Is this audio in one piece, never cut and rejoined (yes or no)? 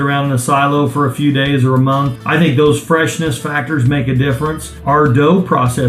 no